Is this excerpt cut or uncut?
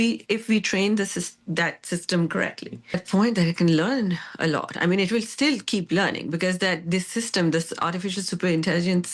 cut